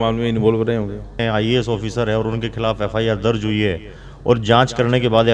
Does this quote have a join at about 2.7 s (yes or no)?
no